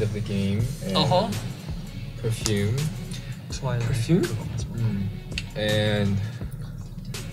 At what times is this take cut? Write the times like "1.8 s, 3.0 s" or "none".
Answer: none